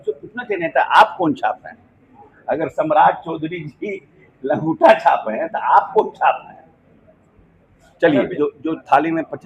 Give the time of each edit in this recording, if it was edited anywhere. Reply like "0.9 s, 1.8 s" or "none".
8.3 s